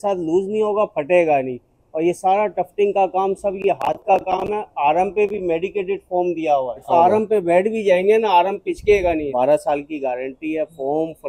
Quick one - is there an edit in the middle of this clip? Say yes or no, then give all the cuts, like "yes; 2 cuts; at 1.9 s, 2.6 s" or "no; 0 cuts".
yes; 2 cuts; at 6.8 s, 9.3 s